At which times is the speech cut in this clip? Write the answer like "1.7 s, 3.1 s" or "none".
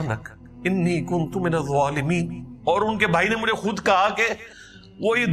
2.4 s